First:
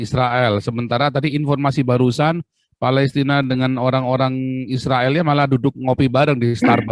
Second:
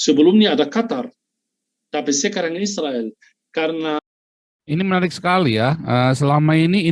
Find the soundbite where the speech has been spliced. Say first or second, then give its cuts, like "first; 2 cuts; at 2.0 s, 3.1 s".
second; 1 cut; at 4.0 s